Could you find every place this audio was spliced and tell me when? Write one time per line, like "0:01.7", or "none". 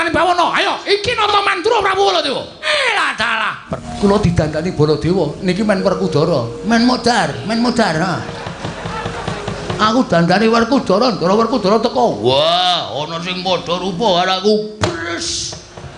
0:02.6
0:03.9